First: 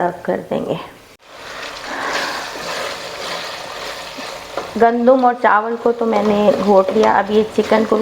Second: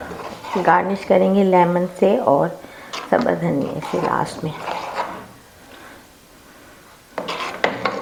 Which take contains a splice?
first; 1 cut; at 1.3 s

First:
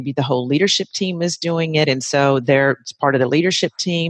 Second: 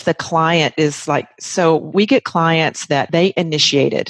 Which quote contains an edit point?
second; 2 cuts; at 1.9 s, 3.1 s

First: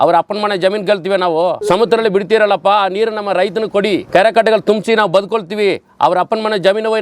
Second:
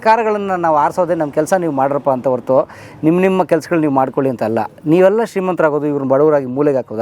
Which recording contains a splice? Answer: first; 2 cuts; at 1.6 s, 4.0 s

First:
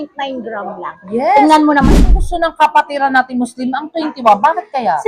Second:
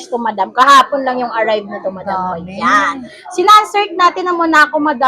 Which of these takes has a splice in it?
first; 1 cut; at 2.0 s

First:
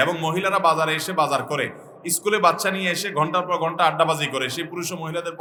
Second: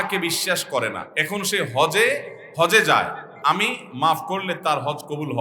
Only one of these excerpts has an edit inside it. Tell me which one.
second; 3 cuts; at 1.1 s, 2.4 s, 3.2 s

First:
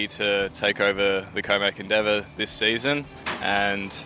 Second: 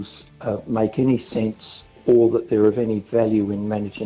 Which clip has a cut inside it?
second; 1 cut; at 2.0 s

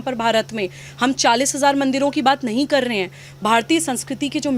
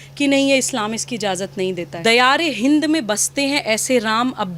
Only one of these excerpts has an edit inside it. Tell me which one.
second; 1 cut; at 1.9 s

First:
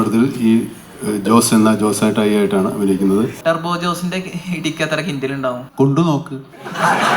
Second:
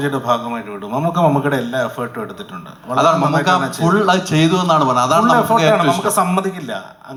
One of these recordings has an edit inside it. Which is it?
first; 2 cuts; at 3.4 s, 5.7 s

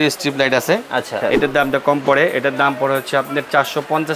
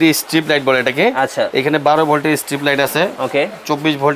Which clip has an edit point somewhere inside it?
first; 1 cut; at 1.2 s

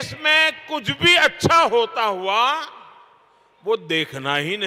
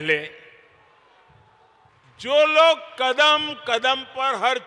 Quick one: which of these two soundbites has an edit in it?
second; 1 cut; at 1.9 s

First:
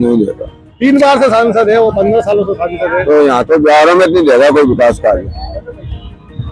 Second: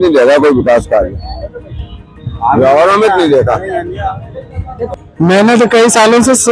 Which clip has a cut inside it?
second; 1 cut; at 4.9 s

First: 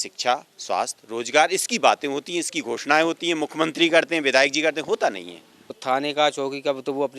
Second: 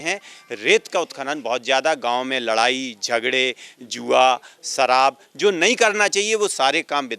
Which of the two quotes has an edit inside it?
first; 1 cut; at 5.8 s

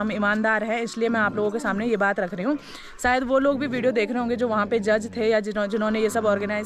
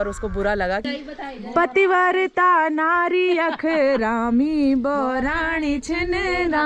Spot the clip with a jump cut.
second; 1 cut; at 1.4 s

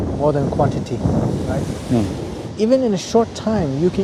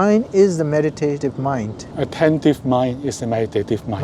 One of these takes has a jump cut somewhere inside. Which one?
second; 1 cut; at 1.3 s

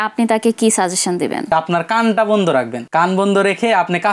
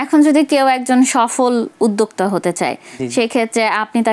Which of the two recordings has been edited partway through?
first; 2 cuts; at 1.5 s, 2.8 s

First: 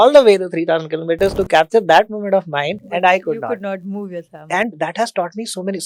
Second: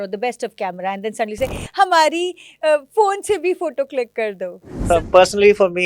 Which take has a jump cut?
second; 1 cut; at 4.8 s

